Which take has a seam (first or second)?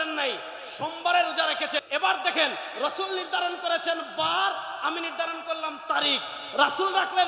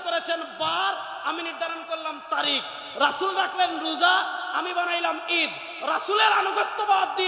first